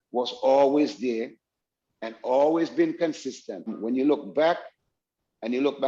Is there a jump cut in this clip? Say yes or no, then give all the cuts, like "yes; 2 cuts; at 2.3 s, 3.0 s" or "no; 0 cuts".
yes; 1 cut; at 3.7 s